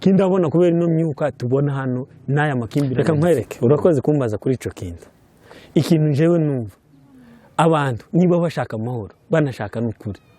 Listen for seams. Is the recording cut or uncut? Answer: cut